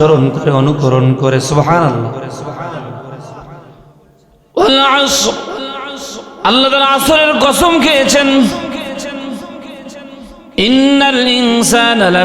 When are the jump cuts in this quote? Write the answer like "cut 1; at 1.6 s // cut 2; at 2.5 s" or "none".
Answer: cut 1; at 3.8 s